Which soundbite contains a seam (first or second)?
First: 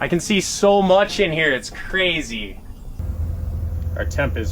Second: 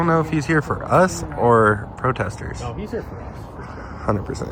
first